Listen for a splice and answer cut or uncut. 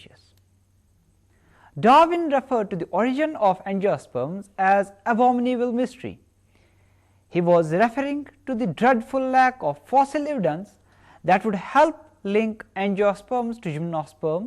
cut